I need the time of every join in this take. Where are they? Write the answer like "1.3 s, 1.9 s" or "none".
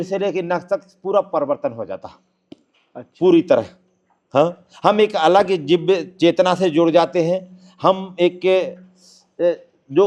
none

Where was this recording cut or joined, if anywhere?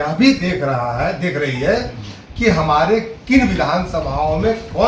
none

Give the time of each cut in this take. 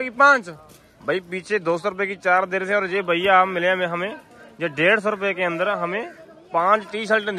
none

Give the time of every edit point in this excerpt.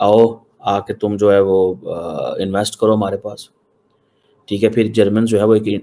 none

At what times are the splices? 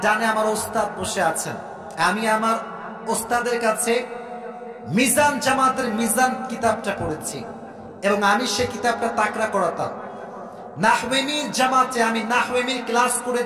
none

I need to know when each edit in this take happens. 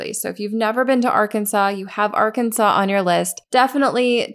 3.4 s

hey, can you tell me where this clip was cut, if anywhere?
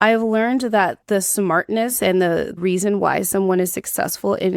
1.0 s, 2.6 s

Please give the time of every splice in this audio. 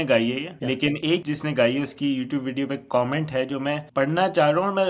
1.1 s, 3.8 s

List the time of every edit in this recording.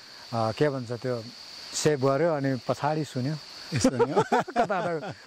none

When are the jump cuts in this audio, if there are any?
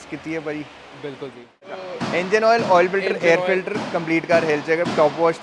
none

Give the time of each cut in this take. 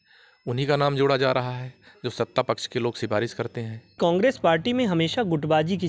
4.0 s

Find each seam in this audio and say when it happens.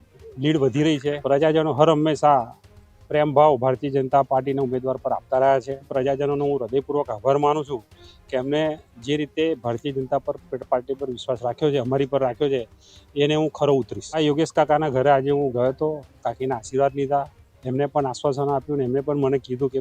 1.2 s, 5.9 s, 14.2 s

